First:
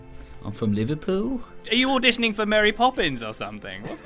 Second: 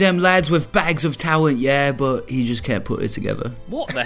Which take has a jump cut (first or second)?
first